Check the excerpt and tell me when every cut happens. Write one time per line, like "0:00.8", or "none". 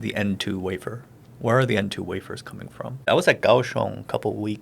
none

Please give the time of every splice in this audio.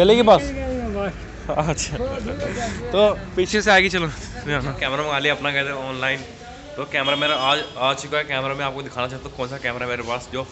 0:04.8

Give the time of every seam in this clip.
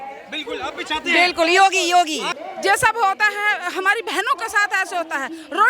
0:02.4

